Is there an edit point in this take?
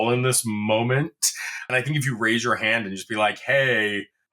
yes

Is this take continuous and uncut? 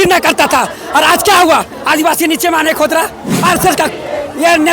no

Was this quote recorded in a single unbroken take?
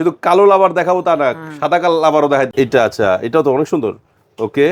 no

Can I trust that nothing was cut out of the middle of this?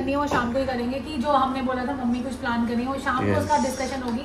yes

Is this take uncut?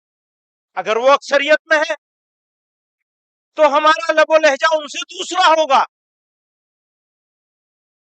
yes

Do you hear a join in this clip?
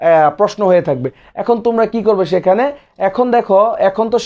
no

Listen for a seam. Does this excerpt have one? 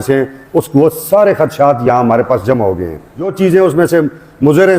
yes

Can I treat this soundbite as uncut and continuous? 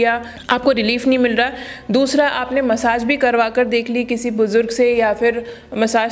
yes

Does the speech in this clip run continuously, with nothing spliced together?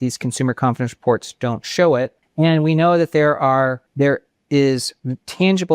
no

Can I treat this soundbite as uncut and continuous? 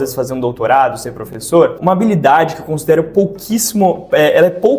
no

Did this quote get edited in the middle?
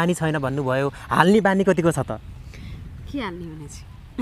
no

